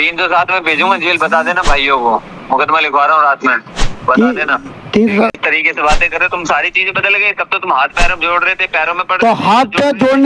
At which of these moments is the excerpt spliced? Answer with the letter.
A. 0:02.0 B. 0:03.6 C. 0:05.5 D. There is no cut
C